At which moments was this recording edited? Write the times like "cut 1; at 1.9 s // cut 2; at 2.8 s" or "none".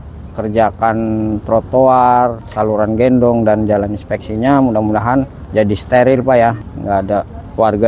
cut 1; at 2.5 s // cut 2; at 5.4 s // cut 3; at 6.6 s